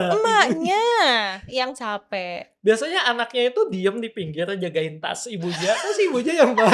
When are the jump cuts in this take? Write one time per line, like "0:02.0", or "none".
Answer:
none